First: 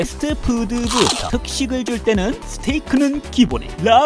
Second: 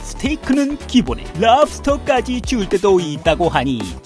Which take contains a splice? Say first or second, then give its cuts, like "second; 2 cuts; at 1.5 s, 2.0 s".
first; 1 cut; at 1.2 s